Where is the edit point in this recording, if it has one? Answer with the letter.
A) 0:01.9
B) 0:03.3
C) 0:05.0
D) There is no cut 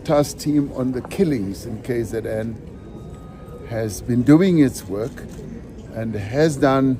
D